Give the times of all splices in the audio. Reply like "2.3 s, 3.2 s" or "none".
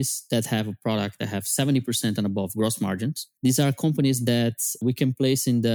3.2 s, 4.8 s